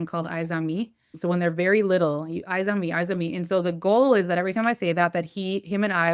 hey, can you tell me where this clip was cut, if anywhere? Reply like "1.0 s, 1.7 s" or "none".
1.0 s